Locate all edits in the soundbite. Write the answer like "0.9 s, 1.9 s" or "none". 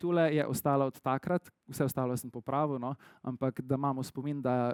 none